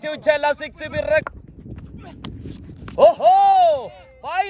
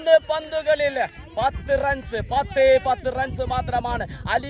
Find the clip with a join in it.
first; 1 cut; at 1.2 s

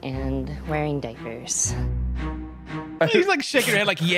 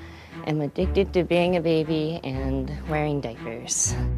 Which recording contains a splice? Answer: first; 1 cut; at 2.9 s

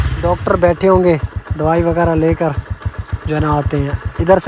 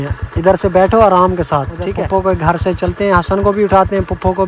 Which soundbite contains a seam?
second; 1 cut; at 1.8 s

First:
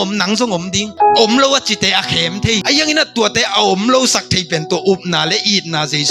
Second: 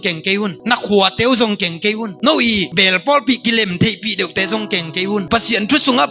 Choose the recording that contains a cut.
first; 2 cuts; at 0.8 s, 2.6 s

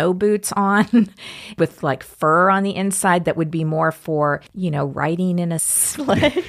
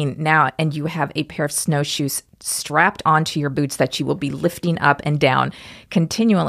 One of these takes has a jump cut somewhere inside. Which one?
first; 1 cut; at 1.5 s

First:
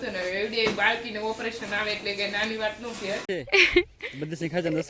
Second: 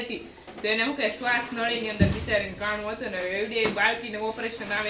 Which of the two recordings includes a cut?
first; 1 cut; at 3.3 s

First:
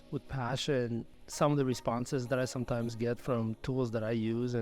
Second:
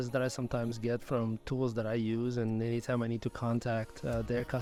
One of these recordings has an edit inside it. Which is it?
first; 1 cut; at 1.2 s

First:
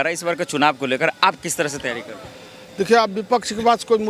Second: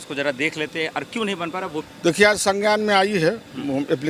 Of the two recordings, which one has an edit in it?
second; 1 cut; at 1.9 s

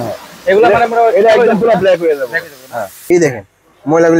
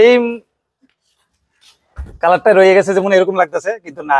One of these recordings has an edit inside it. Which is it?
first; 1 cut; at 3.0 s

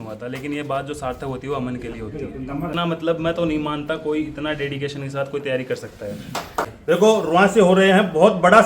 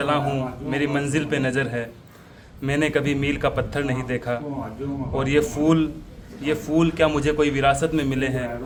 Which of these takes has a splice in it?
first; 2 cuts; at 2.7 s, 7.0 s

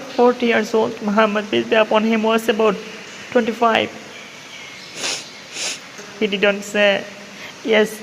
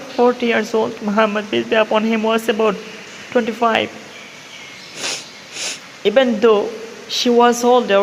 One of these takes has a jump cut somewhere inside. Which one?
first; 1 cut; at 6.0 s

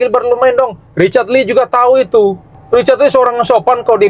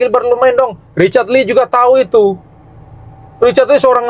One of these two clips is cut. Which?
first; 1 cut; at 2.5 s

